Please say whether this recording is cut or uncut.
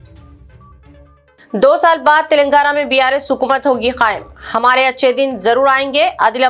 cut